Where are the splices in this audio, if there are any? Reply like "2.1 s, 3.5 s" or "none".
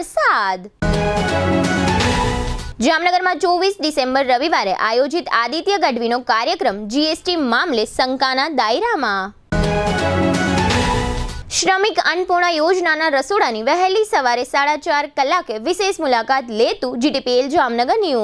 none